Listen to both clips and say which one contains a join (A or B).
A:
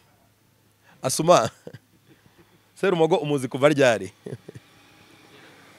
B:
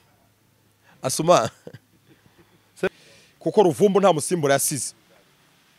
B